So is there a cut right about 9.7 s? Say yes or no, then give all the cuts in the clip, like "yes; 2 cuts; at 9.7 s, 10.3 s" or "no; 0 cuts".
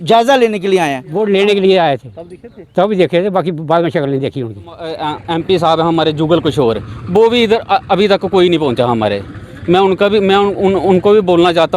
no; 2 cuts; at 1.1 s, 5.0 s